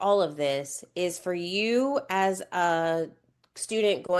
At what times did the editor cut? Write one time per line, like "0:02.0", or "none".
none